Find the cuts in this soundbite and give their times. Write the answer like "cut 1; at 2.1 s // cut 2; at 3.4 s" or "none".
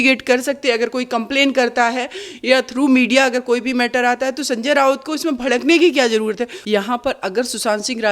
cut 1; at 6.5 s